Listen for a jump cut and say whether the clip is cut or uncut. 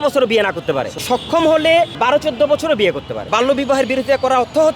cut